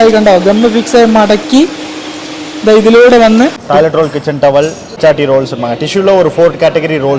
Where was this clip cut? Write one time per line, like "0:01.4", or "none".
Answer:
0:03.6
0:04.9